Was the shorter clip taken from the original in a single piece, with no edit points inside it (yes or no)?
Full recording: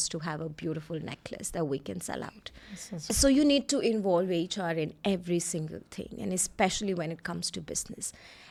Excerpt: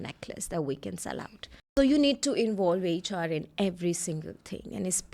no